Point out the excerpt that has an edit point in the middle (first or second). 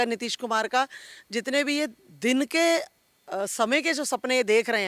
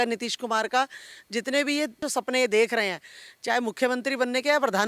second